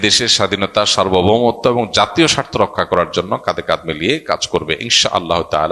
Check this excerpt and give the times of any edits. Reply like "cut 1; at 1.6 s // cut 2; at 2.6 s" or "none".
none